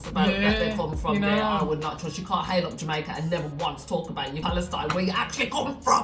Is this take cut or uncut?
cut